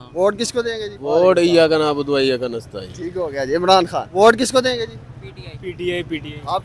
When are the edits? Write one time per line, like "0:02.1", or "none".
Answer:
0:00.9
0:04.1